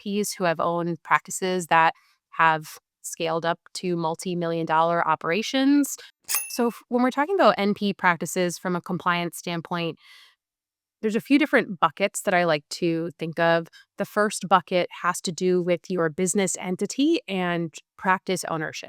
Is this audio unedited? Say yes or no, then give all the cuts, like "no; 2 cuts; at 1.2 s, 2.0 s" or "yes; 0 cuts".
no; 1 cut; at 6.3 s